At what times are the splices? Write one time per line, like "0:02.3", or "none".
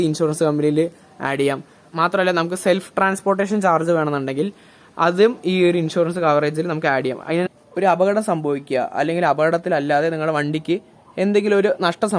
0:07.5

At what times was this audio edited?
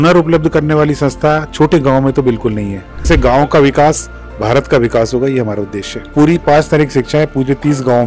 0:03.1
0:06.1

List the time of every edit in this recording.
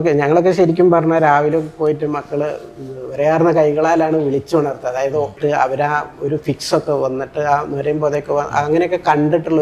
0:05.3

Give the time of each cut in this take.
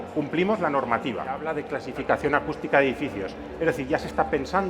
0:01.6

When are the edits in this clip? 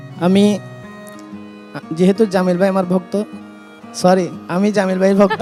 none

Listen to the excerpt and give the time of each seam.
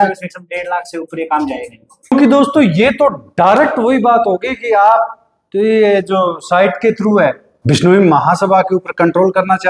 0:02.1

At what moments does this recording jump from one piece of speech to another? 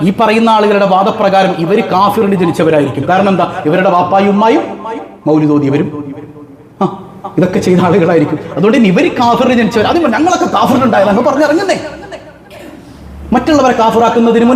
none

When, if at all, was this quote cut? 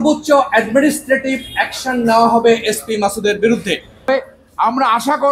0:04.1

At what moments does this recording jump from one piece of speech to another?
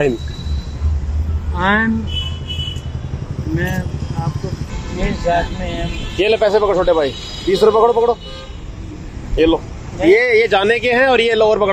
0:04.4

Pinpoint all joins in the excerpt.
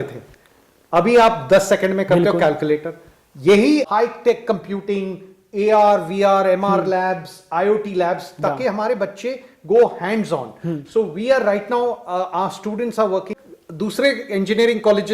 0:03.9
0:13.4

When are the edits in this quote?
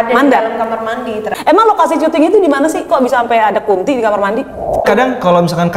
0:01.3
0:04.8

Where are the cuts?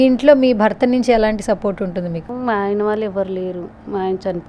0:02.3

